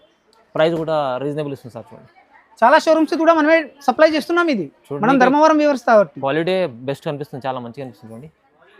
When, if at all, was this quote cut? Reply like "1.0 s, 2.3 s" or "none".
2.1 s

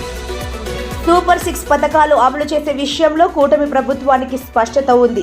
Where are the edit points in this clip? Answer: 1.0 s

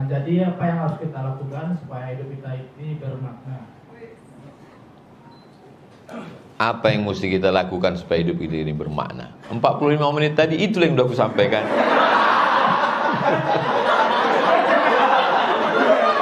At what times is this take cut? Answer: none

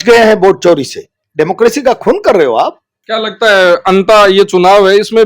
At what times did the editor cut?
1.1 s, 2.9 s

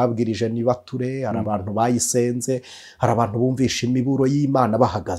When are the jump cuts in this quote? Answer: none

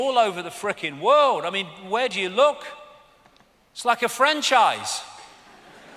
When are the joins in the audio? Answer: none

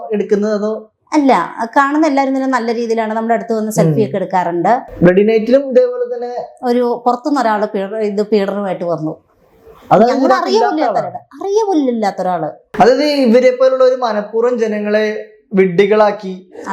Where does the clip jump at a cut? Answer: 4.9 s, 12.6 s

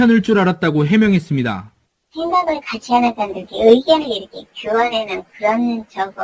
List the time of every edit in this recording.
3.2 s

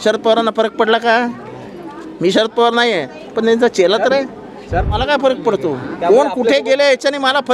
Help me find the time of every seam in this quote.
4.9 s

